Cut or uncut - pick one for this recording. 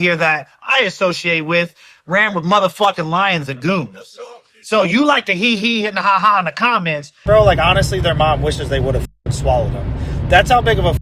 cut